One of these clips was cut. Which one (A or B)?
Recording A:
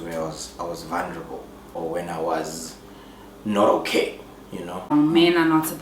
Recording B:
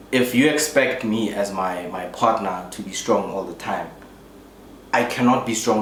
A